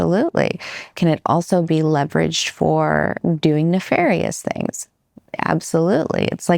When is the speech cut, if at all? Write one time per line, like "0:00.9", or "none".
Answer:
0:03.2